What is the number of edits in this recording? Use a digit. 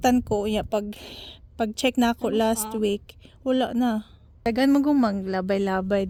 0